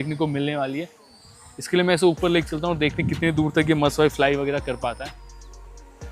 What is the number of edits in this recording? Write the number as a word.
one